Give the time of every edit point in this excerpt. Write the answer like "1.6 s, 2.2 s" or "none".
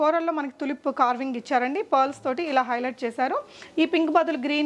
none